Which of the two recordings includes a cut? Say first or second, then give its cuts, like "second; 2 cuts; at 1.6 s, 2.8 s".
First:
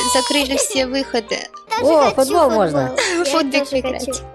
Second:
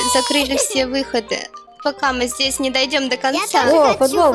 first; 1 cut; at 1.8 s